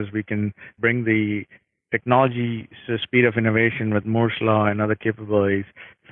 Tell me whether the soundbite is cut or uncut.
uncut